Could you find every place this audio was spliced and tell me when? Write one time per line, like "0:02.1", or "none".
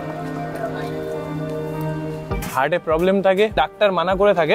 0:02.4